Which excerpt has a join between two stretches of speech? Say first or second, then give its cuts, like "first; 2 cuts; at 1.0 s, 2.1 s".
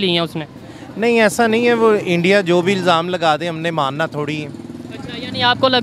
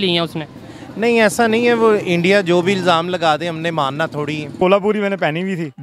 second; 1 cut; at 4.6 s